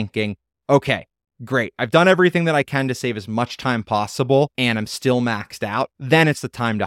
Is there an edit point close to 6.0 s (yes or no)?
yes